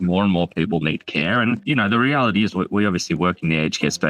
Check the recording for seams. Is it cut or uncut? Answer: cut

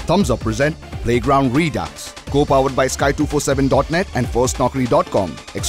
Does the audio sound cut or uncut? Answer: uncut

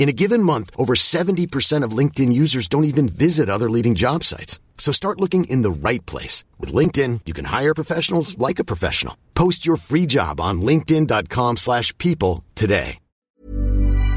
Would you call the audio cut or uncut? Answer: cut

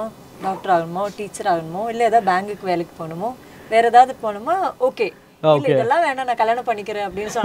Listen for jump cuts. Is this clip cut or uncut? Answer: uncut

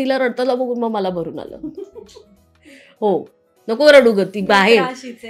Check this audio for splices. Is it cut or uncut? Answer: uncut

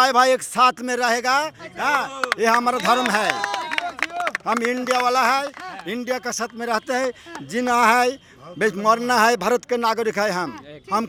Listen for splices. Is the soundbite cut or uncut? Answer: uncut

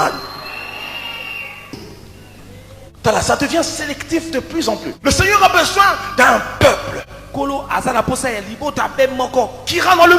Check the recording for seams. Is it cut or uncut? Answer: cut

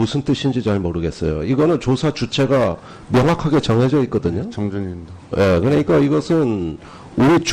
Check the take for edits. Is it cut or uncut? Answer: cut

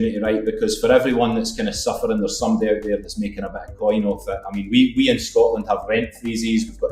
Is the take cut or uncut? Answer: uncut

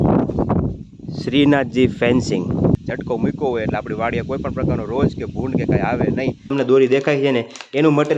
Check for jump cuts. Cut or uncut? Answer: cut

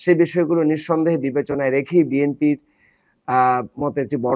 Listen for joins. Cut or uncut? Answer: uncut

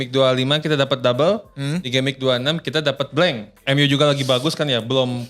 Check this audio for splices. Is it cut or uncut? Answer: cut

